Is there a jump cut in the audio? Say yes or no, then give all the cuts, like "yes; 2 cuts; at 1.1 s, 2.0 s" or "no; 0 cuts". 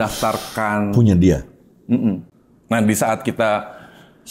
yes; 1 cut; at 2.3 s